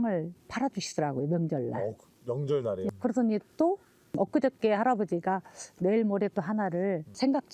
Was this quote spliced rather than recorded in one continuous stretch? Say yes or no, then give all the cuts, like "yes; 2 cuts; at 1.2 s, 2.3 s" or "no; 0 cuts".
yes; 1 cut; at 2.9 s